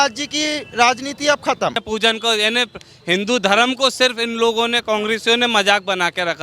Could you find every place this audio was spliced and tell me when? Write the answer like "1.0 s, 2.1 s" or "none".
1.8 s